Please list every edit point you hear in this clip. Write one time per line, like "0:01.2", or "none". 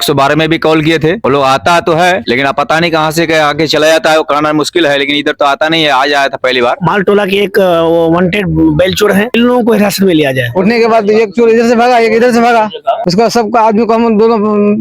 0:06.8
0:10.5